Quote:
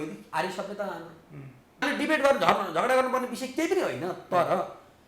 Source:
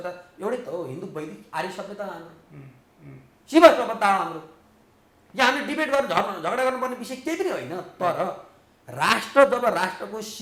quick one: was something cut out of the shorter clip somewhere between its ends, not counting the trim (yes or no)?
yes